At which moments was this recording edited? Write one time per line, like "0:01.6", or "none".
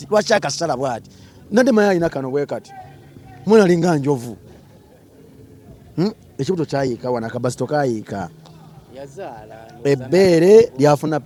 none